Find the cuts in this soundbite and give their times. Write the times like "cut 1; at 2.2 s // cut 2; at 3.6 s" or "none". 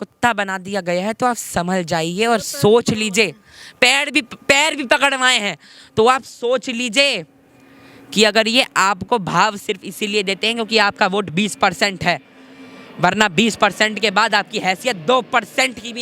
none